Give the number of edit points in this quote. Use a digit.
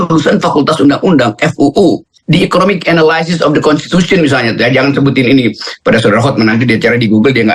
1